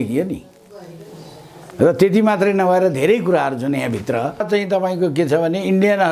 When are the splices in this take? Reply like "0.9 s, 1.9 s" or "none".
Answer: 4.4 s